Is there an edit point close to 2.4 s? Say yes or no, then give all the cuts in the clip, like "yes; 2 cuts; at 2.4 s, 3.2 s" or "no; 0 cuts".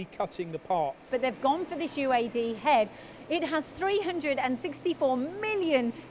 no; 2 cuts; at 1.0 s, 3.8 s